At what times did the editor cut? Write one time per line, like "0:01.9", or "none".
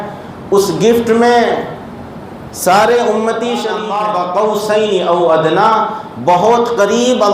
0:03.8